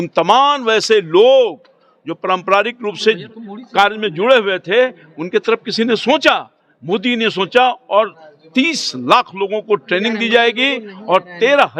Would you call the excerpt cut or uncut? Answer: uncut